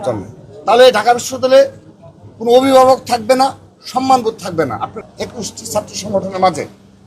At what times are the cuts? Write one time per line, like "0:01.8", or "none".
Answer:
0:05.1